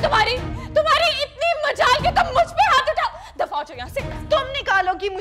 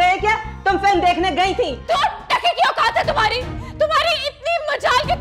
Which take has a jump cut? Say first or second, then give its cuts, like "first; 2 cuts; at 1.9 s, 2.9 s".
second; 1 cut; at 1.8 s